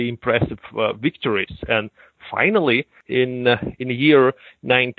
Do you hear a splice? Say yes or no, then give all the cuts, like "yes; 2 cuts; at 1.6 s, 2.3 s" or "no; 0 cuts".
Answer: no; 0 cuts